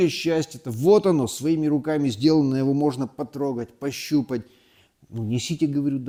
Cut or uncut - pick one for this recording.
uncut